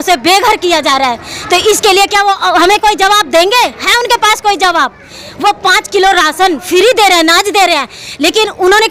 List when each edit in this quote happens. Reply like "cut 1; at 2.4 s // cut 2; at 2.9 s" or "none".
none